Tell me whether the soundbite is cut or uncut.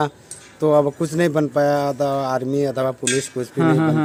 uncut